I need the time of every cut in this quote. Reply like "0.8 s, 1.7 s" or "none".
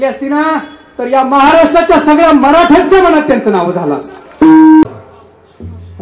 4.8 s